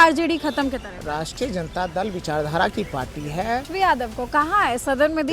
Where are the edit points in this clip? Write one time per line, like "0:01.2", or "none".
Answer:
0:03.7